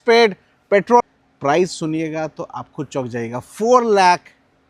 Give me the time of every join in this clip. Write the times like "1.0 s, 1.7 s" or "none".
1.0 s